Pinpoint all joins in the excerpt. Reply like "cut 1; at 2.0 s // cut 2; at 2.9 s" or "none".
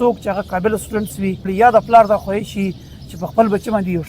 cut 1; at 1.5 s